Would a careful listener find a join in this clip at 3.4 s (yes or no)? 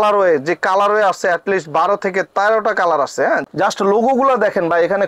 yes